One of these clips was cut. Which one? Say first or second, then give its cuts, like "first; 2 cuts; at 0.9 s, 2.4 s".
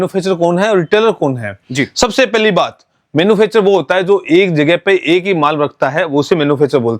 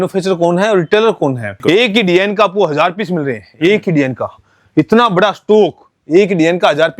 second; 1 cut; at 1.5 s